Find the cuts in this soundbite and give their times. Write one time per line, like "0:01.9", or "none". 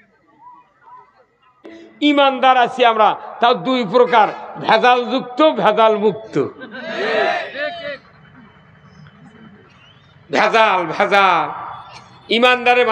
0:01.7